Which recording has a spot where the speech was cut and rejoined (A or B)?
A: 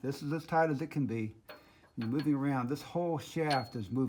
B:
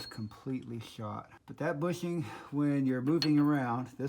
B